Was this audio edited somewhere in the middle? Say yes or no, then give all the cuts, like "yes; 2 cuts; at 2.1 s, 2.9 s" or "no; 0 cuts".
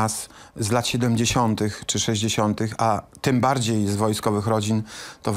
no; 0 cuts